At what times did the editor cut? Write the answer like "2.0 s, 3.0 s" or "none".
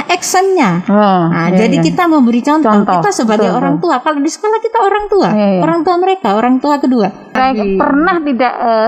7.4 s